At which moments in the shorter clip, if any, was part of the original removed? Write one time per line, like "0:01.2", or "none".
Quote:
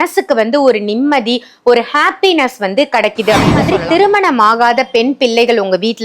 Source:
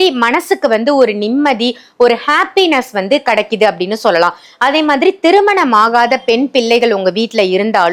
0:03.6